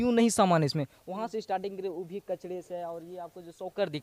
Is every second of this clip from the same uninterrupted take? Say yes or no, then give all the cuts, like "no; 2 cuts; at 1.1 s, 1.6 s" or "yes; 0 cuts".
yes; 0 cuts